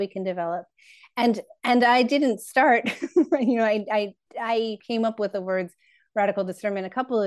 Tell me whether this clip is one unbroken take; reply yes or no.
no